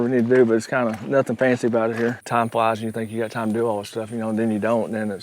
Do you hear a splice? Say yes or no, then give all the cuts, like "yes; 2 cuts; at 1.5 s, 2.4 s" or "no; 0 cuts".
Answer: yes; 1 cut; at 2.2 s